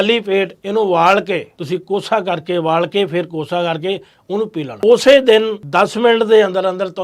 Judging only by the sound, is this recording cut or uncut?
cut